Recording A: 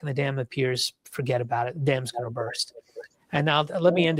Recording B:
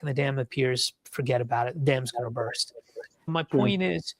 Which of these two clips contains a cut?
B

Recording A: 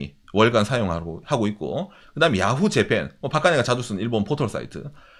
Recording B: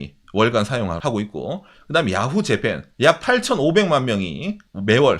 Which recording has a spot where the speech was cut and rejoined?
B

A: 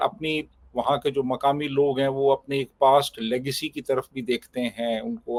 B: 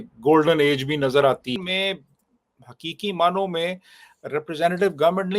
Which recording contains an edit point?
B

